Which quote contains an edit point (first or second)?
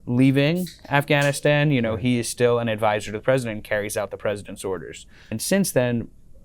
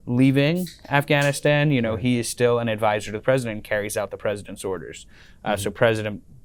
first